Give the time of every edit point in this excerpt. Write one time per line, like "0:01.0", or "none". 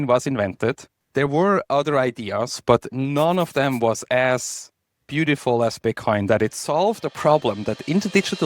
0:00.9